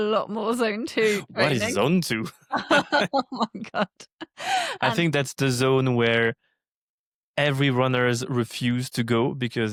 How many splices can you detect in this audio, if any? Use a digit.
0